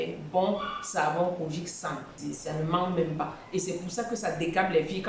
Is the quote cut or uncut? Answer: cut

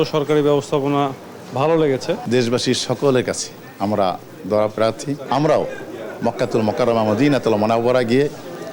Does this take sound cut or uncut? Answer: cut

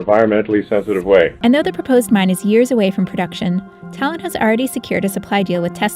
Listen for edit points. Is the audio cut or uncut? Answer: cut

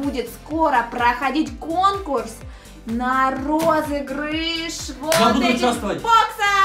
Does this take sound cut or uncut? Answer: uncut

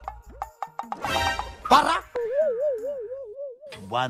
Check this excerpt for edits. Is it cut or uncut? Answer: uncut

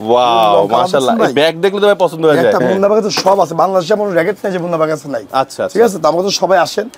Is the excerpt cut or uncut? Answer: cut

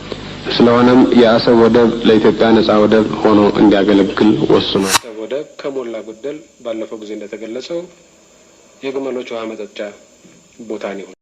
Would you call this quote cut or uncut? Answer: cut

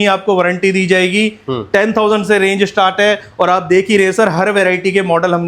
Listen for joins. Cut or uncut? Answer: uncut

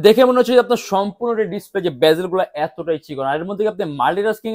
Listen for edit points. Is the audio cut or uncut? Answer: uncut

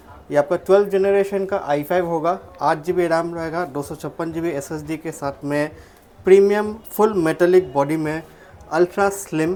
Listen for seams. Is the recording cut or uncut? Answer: uncut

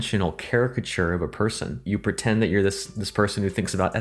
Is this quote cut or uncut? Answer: cut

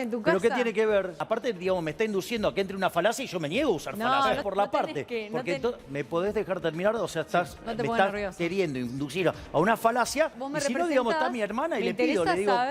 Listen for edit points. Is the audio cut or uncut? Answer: cut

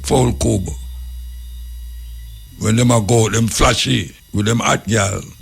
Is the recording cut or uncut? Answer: cut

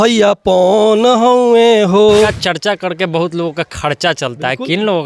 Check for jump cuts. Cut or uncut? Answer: cut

